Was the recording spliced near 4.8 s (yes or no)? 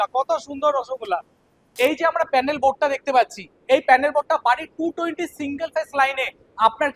no